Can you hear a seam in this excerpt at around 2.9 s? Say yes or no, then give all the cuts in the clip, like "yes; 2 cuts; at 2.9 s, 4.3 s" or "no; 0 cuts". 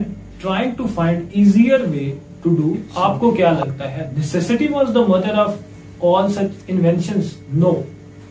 yes; 1 cut; at 2.9 s